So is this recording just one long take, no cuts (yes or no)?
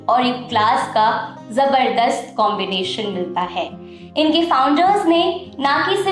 yes